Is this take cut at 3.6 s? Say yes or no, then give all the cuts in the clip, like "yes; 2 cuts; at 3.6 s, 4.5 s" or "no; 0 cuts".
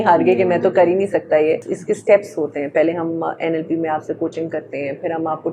no; 1 cut; at 1.7 s